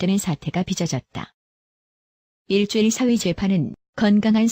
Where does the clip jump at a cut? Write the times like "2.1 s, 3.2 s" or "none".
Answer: 3.1 s